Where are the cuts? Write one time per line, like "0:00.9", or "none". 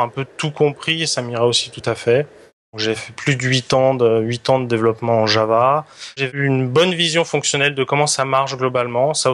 0:02.7
0:06.3